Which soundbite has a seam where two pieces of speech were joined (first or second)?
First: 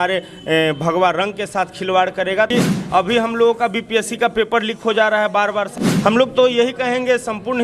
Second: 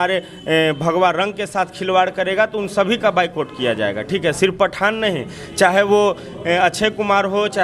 first